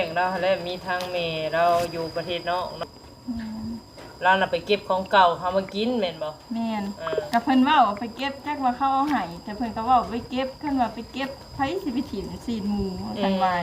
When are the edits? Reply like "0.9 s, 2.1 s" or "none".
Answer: 2.8 s